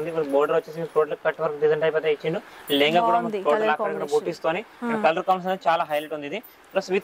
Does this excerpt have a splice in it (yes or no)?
no